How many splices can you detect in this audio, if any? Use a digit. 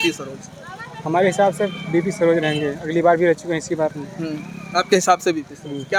0